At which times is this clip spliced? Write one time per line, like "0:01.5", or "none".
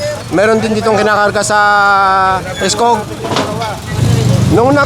0:03.9